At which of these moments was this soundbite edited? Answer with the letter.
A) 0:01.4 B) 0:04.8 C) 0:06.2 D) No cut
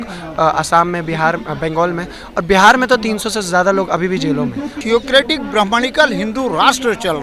B